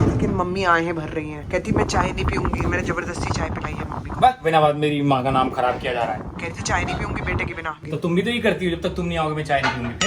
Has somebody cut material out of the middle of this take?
yes; 1 cut; at 7.8 s

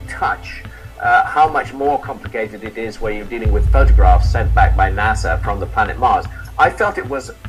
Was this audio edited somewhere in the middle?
yes; 1 cut; at 4.4 s

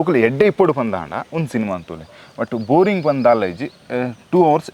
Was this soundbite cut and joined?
no; 0 cuts

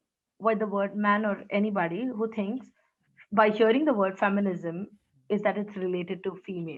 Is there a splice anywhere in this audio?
no; 0 cuts

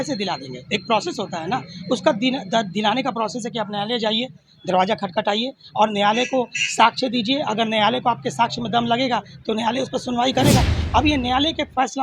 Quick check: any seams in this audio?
yes; 1 cut; at 10.8 s

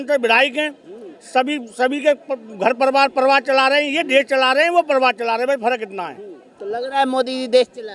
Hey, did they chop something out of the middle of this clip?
no; 0 cuts

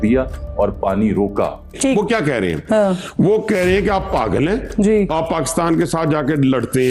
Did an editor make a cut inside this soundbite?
yes; 1 cut; at 1.7 s

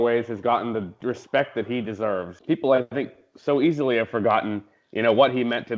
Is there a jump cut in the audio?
yes; 1 cut; at 2.3 s

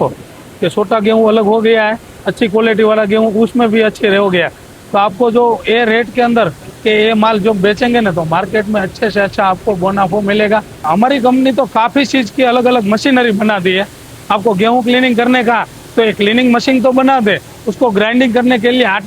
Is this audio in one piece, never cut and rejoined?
no; 1 cut; at 10.8 s

